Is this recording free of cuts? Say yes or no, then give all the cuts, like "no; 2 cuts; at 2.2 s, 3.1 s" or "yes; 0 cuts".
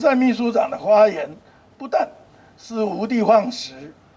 yes; 0 cuts